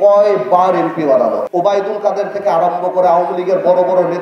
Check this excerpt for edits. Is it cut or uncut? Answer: cut